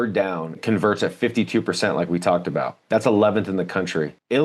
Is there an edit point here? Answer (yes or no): no